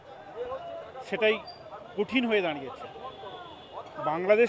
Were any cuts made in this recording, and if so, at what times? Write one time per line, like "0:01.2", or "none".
none